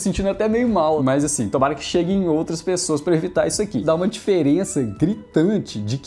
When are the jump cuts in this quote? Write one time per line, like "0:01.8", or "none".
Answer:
0:01.0
0:03.8